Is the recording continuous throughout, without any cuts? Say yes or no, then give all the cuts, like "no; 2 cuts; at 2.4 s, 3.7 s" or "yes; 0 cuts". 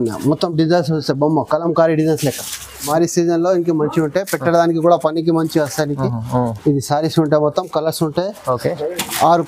no; 1 cut; at 2.9 s